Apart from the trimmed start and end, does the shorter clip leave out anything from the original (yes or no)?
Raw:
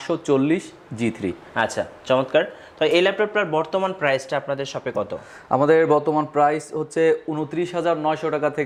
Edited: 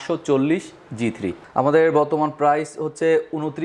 yes